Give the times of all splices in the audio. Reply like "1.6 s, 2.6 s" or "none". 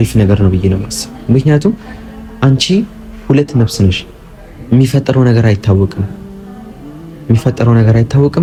none